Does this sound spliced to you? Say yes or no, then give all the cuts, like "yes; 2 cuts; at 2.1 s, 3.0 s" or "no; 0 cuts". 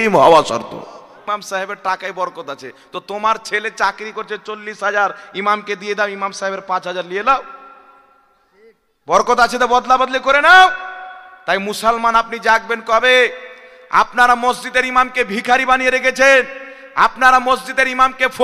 yes; 1 cut; at 1.2 s